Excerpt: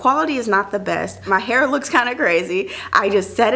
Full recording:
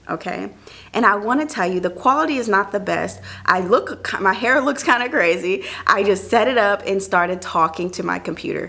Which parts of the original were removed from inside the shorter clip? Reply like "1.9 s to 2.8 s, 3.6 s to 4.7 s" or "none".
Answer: 3.2 s to 4.1 s

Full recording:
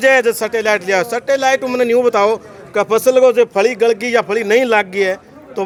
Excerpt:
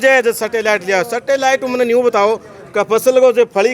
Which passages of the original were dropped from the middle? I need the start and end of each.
none

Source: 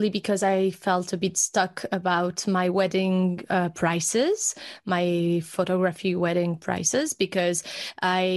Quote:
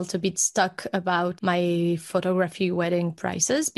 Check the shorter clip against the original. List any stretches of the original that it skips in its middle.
2.3 s to 4.8 s

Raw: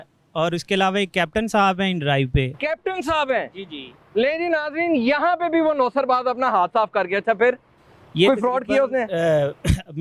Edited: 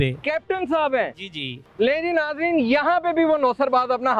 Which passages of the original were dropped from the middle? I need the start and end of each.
none

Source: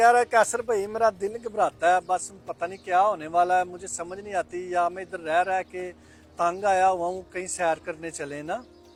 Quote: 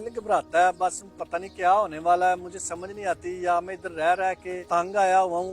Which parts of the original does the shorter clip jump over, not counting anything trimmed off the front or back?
5.8 s to 6.2 s

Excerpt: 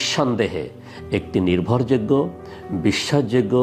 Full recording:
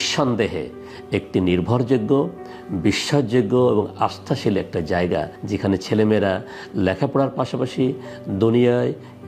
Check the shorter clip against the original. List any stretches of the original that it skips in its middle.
none

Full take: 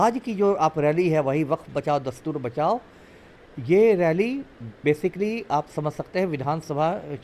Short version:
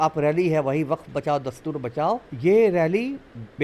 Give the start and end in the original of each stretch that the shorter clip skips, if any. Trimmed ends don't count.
2.9 s to 3.5 s

